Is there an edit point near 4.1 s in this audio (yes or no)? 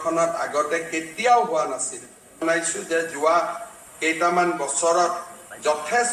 no